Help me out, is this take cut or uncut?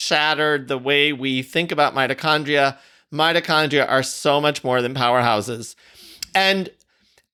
uncut